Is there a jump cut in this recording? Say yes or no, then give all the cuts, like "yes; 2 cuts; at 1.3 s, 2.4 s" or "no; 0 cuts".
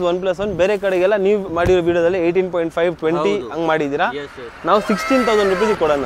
no; 0 cuts